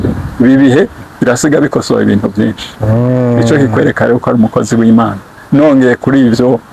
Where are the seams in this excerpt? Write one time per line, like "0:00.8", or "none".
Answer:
none